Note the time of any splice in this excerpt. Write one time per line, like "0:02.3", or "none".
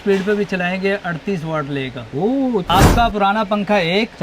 0:02.7